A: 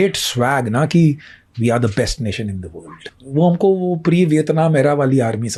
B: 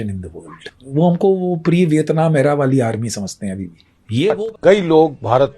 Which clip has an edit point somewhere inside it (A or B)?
B